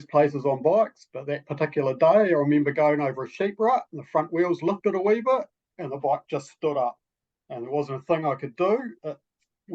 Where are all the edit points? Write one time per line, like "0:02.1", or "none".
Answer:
none